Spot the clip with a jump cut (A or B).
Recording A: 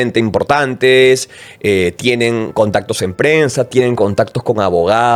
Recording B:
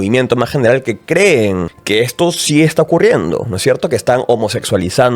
B